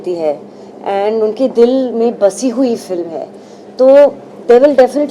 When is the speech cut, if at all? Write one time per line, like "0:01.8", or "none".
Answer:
none